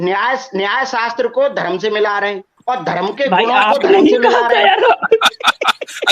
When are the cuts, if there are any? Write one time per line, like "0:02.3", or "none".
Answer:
0:02.5